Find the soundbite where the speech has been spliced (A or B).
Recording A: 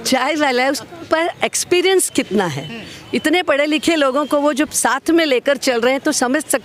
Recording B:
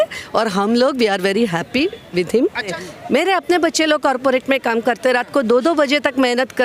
B